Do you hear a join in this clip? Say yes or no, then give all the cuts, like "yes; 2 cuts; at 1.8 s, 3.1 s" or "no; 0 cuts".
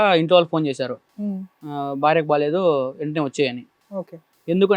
yes; 1 cut; at 3.8 s